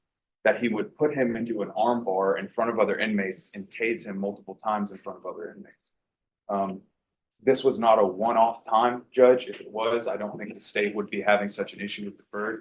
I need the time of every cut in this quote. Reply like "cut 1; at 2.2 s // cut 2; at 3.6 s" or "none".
none